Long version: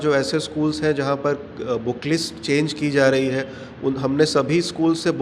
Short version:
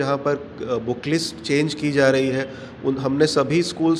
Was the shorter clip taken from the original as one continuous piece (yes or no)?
yes